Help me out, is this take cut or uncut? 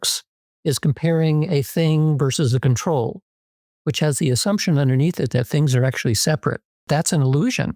cut